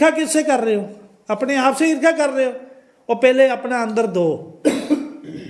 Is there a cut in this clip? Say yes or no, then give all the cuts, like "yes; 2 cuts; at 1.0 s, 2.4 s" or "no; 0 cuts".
no; 0 cuts